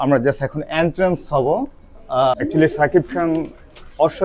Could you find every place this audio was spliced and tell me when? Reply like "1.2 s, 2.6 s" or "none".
2.3 s